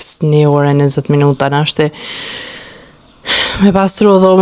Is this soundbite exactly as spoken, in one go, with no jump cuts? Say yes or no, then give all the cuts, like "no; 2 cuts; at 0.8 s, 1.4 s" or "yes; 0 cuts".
yes; 0 cuts